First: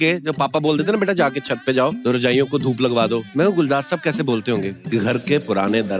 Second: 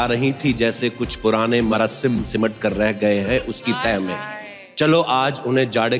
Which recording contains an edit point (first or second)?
first